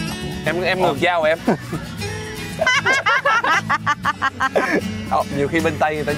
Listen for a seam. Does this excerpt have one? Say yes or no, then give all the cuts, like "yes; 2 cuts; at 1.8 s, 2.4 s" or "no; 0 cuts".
no; 0 cuts